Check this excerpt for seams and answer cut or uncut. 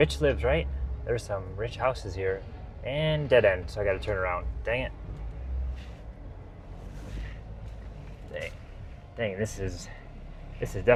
uncut